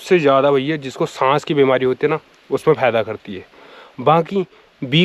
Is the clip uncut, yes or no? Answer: yes